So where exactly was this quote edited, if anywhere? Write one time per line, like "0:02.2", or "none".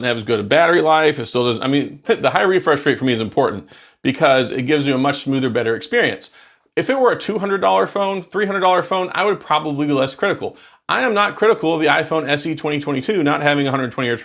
0:01.9